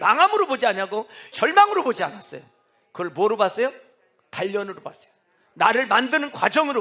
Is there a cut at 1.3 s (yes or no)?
yes